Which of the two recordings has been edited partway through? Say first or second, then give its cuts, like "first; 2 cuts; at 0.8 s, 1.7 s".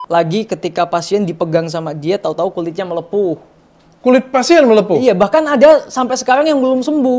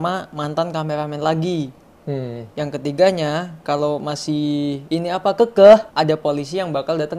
second; 2 cuts; at 4.8 s, 5.9 s